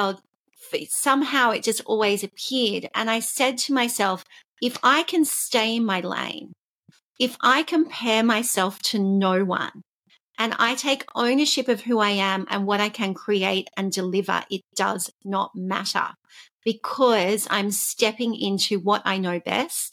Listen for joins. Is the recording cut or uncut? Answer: uncut